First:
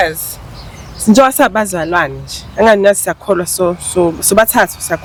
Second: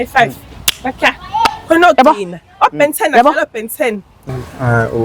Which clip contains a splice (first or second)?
second